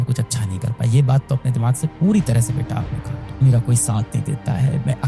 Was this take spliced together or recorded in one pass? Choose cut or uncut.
cut